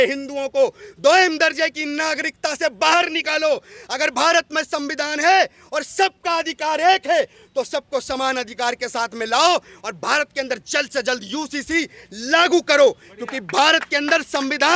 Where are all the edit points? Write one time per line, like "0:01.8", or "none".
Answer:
none